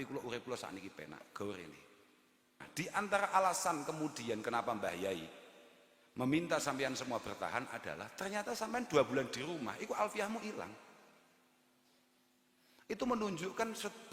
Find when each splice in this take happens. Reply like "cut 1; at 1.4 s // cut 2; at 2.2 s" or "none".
cut 1; at 2.7 s